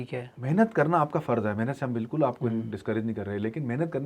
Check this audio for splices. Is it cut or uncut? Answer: uncut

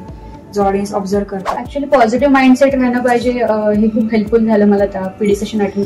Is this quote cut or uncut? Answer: cut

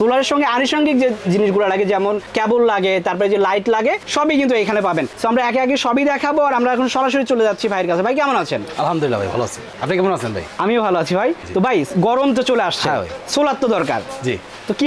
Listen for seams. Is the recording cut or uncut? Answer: uncut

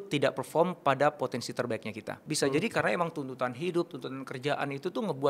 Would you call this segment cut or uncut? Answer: cut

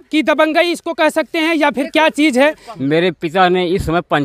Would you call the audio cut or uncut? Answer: cut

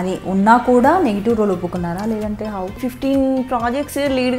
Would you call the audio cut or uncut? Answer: cut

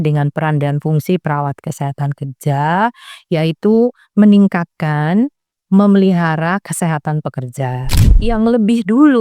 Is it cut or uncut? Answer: cut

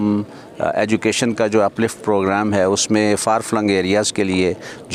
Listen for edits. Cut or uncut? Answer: uncut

